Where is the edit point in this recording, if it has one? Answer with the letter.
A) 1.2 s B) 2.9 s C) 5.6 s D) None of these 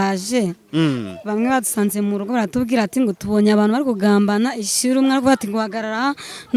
D